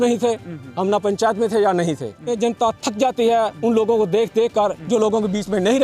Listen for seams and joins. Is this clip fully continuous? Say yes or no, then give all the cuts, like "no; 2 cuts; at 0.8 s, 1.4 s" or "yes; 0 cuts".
no; 1 cut; at 2.3 s